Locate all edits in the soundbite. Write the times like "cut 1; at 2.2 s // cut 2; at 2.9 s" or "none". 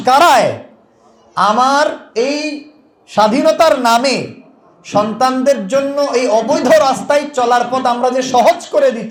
none